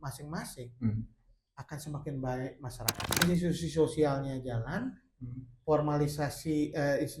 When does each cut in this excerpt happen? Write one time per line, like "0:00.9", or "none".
0:03.1